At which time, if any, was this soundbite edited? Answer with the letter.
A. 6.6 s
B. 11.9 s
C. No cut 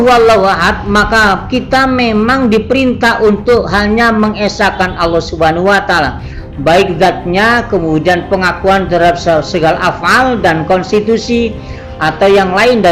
C